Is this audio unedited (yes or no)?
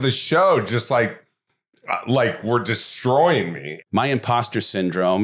no